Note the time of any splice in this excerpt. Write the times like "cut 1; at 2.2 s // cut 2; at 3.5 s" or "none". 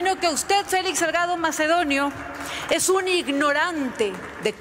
none